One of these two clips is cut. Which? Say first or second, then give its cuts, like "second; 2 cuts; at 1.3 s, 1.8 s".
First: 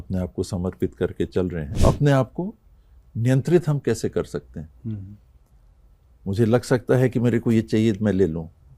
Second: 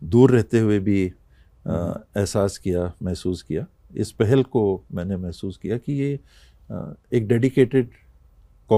first; 1 cut; at 1.7 s